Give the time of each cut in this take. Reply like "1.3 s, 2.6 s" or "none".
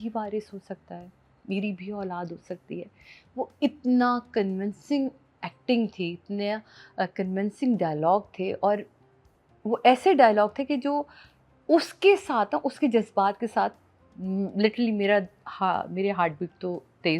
none